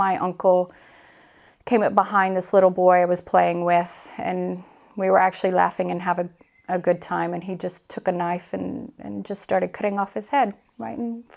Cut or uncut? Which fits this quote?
uncut